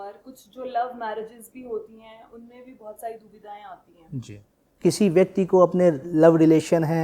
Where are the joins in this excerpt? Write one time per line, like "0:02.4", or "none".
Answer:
0:04.7